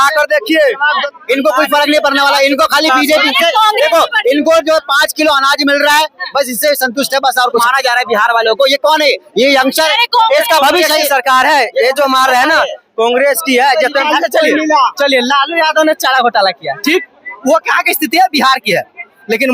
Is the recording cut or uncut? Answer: cut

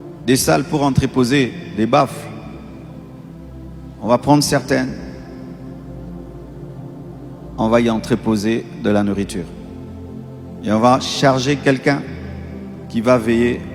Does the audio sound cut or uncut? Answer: uncut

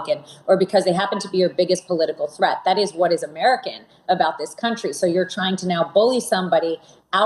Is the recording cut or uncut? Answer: uncut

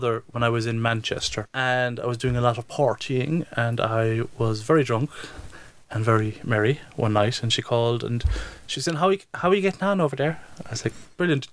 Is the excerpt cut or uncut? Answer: cut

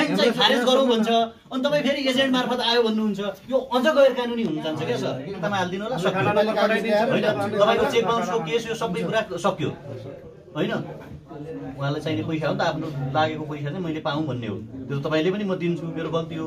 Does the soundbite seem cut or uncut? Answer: cut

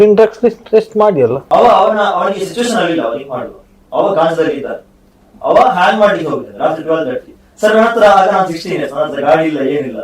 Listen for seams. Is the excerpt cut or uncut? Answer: cut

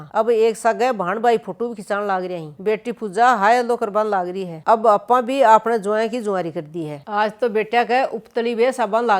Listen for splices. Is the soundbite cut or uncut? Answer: cut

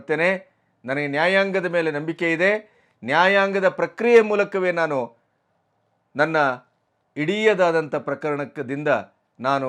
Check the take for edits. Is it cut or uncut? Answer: uncut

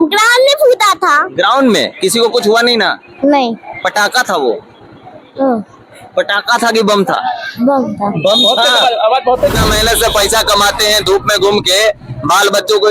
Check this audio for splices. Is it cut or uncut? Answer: cut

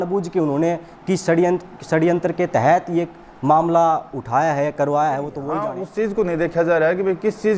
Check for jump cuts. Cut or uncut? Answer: cut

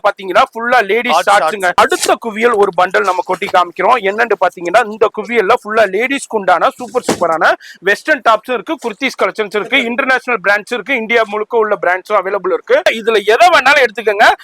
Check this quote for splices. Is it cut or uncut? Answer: cut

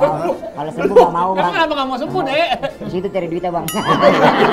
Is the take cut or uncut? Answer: cut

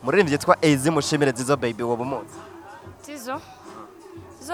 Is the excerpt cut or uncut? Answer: uncut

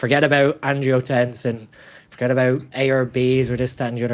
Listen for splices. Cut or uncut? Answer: uncut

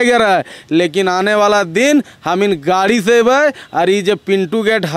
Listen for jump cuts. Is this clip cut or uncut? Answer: uncut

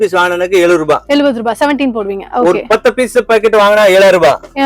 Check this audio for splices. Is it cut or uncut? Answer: uncut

